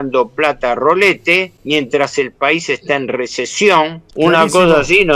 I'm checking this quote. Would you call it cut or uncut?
cut